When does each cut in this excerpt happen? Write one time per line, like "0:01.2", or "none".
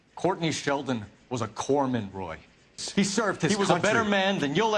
0:03.5